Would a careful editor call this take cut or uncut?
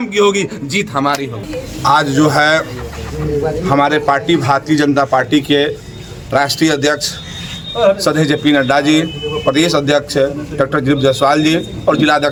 uncut